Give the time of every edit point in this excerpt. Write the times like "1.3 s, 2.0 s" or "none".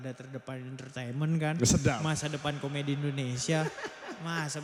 none